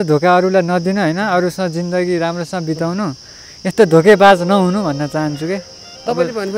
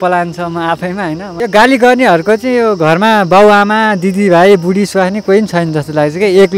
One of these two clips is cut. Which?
second; 1 cut; at 1.3 s

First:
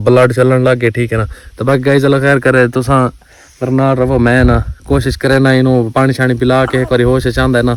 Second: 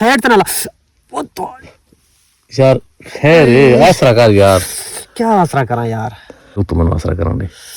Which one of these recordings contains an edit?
second; 1 cut; at 6.7 s

